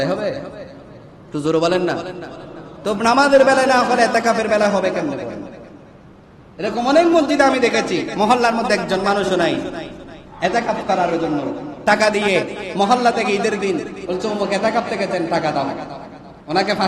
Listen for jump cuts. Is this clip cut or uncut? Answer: uncut